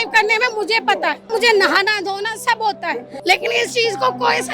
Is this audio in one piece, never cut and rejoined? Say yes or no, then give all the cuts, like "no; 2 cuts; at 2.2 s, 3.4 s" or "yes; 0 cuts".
no; 2 cuts; at 1.3 s, 3.1 s